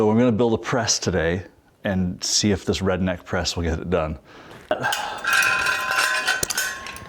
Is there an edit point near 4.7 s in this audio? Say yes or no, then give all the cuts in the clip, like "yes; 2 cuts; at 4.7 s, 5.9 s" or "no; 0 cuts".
yes; 2 cuts; at 1.6 s, 4.7 s